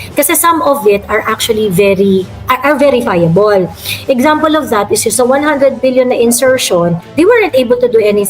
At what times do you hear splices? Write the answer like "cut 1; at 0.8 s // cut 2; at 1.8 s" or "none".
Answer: cut 1; at 5.1 s // cut 2; at 7.0 s